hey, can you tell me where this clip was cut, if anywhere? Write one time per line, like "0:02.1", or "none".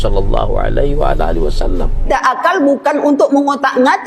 0:02.1